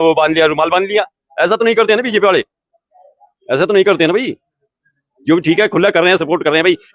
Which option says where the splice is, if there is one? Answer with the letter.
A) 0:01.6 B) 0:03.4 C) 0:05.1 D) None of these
D